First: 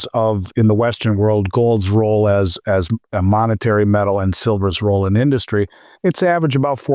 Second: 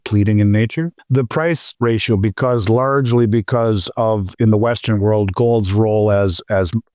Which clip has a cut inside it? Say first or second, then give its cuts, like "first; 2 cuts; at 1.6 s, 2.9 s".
second; 2 cuts; at 1.0 s, 1.7 s